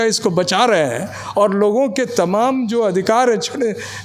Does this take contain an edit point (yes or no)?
no